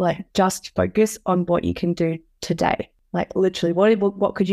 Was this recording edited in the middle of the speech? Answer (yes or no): yes